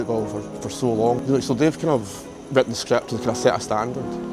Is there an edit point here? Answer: yes; 1 cut; at 1.2 s

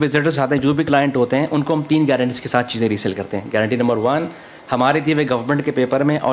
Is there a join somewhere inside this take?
no; 0 cuts

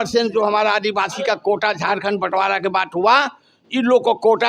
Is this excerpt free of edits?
yes; 0 cuts

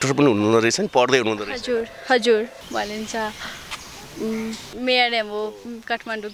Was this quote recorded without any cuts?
no; 2 cuts; at 2.6 s, 4.6 s

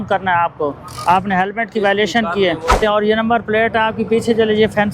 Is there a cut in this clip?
yes; 1 cut; at 2.8 s

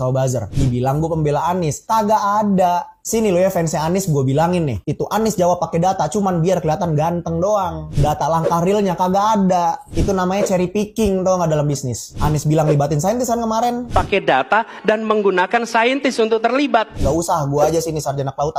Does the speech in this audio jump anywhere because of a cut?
no; 0 cuts

